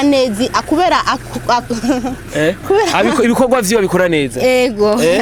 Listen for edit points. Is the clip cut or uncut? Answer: uncut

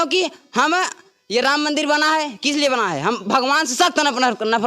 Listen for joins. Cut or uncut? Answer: uncut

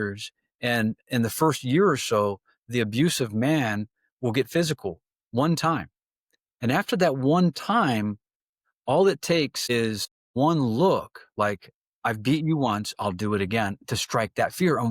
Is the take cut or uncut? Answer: uncut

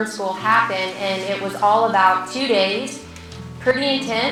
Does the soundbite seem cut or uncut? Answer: uncut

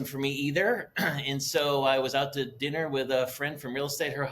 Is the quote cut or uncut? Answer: uncut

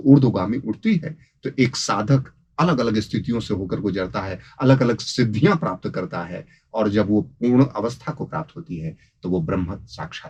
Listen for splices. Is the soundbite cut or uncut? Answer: uncut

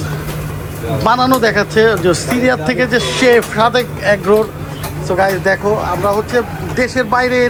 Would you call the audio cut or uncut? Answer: uncut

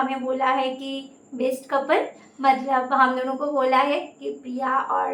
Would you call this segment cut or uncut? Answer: uncut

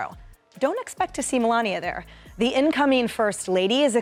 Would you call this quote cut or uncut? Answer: uncut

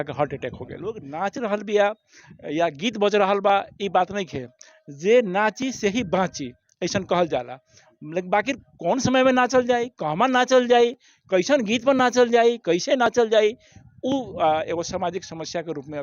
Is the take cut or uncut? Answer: cut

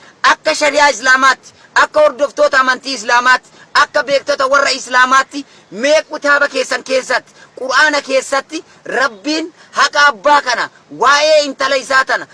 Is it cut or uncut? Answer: uncut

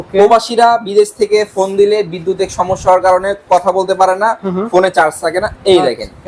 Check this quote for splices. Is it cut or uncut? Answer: uncut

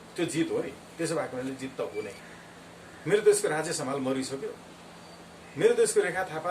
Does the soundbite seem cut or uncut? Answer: cut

